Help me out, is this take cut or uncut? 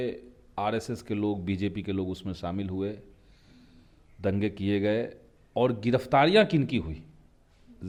uncut